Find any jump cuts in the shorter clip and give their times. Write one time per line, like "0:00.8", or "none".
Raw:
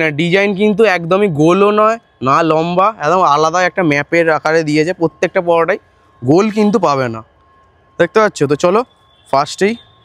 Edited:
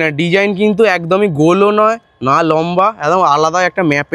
none